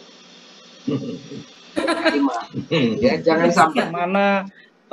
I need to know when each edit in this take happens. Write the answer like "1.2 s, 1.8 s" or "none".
3.9 s